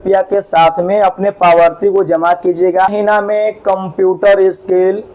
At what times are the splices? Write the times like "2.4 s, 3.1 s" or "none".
2.9 s